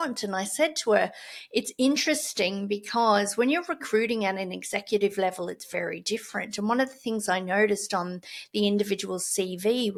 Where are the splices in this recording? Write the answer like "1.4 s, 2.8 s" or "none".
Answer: none